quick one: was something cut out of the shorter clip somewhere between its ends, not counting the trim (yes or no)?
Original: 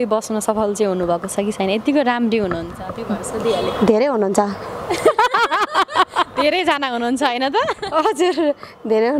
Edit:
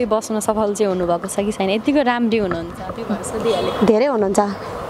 no